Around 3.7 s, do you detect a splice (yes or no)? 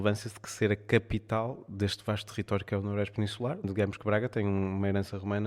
yes